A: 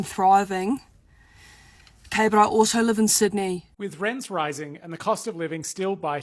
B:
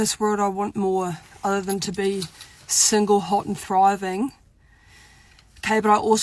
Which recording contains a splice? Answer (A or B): A